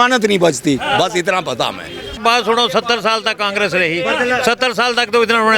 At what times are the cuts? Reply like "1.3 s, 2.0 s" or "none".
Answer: 2.2 s

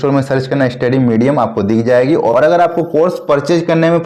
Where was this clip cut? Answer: 2.3 s

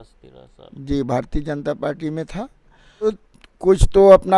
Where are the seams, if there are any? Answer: 3.2 s

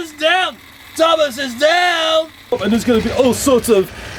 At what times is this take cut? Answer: 2.6 s

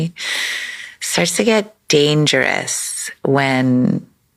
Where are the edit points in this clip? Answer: none

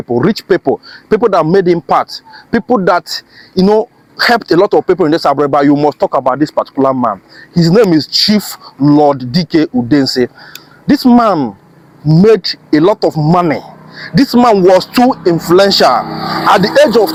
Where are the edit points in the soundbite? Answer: none

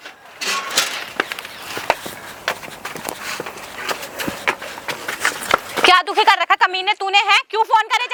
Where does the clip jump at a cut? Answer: none

